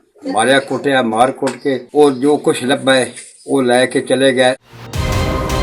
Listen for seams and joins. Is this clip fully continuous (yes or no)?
no